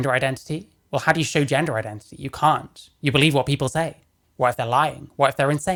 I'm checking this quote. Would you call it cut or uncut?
uncut